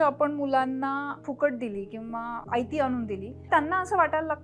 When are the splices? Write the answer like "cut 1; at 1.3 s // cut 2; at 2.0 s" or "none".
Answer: cut 1; at 1.2 s // cut 2; at 2.4 s // cut 3; at 3.5 s